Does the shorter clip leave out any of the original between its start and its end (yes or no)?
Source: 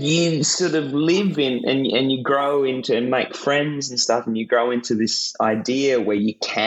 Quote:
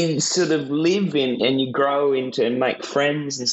yes